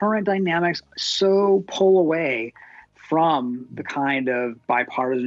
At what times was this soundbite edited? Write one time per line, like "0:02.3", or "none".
none